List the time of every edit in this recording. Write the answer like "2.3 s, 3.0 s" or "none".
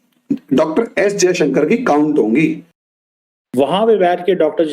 3.0 s